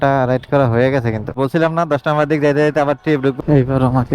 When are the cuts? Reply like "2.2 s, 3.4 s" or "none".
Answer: 1.3 s, 3.4 s

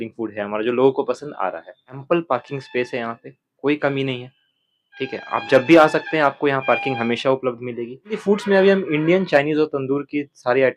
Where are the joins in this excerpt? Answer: 2.0 s, 8.2 s

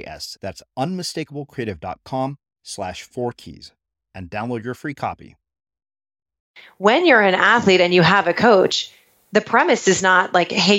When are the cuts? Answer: 6.7 s

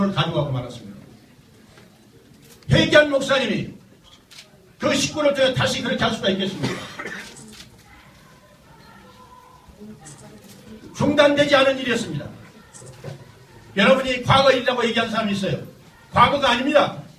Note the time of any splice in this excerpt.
5.5 s

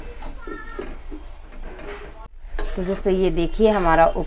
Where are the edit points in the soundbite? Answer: 2.2 s

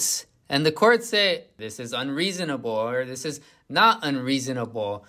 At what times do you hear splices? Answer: 1.5 s

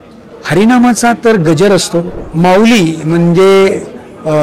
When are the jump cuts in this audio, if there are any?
2.2 s

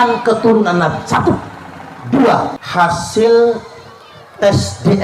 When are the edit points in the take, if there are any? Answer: 2.6 s

